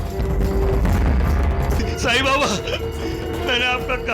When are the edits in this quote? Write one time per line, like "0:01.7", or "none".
0:01.8